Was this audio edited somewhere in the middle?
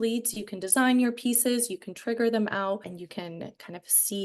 no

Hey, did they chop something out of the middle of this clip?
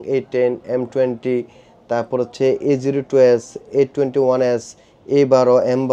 no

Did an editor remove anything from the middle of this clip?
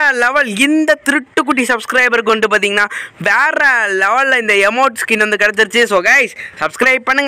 no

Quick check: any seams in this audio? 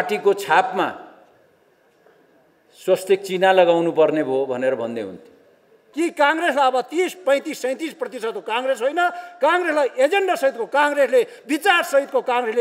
yes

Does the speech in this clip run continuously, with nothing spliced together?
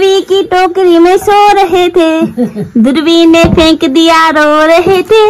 yes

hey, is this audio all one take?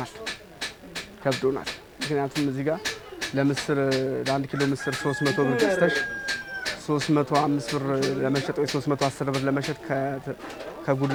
yes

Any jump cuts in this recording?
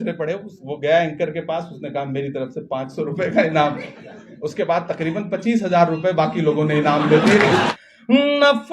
yes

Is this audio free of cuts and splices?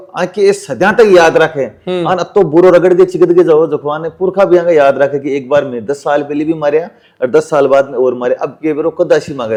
yes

